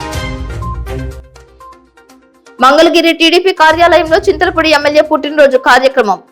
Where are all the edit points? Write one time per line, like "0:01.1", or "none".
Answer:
0:01.2

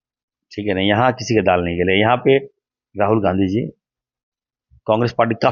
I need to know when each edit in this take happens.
none

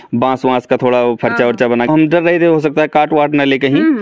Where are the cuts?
0:01.9

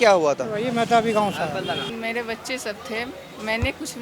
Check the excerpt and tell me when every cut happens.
0:01.9

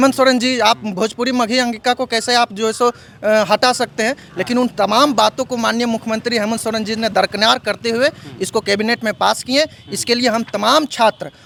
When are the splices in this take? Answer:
none

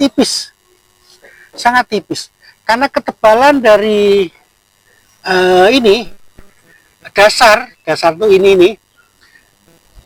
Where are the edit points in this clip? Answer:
none

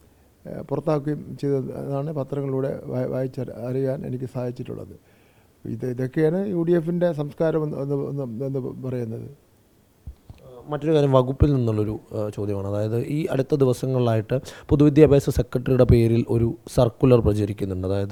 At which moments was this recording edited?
none

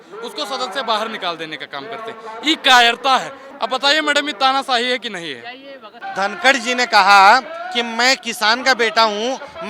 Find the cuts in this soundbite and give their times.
0:03.4
0:05.9

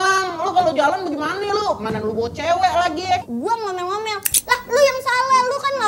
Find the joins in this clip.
0:03.2

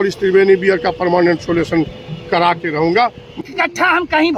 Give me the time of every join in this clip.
0:03.4

